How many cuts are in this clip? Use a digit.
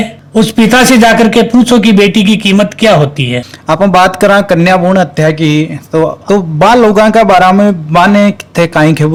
0